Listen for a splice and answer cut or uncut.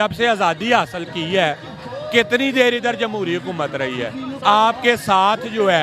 uncut